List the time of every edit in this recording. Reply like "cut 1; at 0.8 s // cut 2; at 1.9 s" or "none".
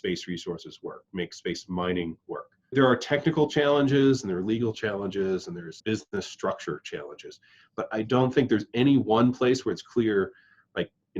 cut 1; at 2.7 s // cut 2; at 5.8 s